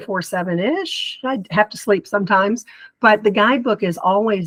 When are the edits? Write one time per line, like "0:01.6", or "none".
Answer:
none

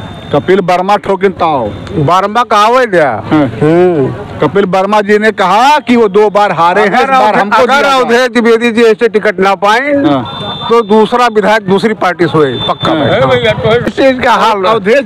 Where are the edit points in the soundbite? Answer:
0:13.9

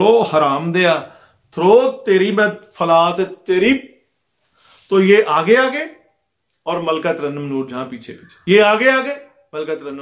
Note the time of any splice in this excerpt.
none

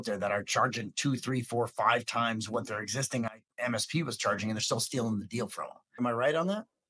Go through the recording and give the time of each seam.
0:03.3
0:06.0

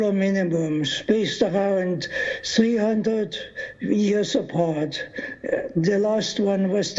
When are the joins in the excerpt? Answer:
0:05.1

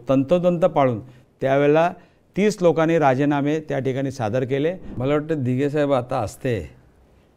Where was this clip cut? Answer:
0:04.9

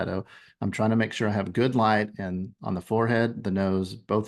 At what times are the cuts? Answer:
none

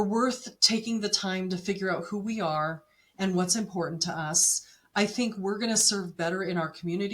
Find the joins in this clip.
none

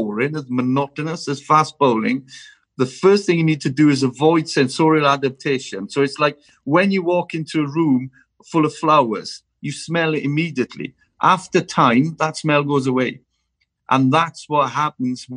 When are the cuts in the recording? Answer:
none

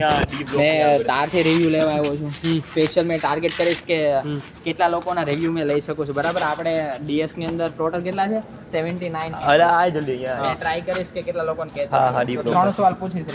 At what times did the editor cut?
none

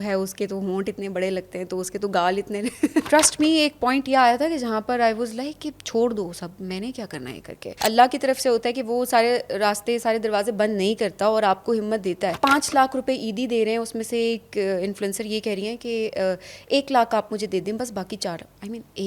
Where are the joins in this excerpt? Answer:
0:03.0
0:07.8
0:12.3

